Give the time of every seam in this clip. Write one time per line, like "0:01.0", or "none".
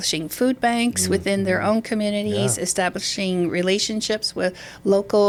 none